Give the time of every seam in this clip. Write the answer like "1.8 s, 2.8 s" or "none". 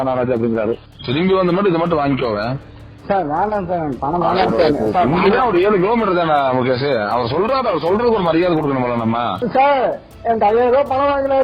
0.9 s, 9.4 s